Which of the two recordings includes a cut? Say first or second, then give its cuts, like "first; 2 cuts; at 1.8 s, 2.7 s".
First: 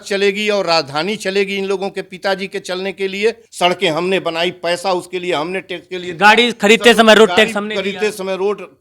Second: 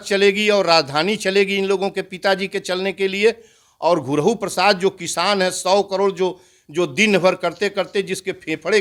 first; 1 cut; at 3.5 s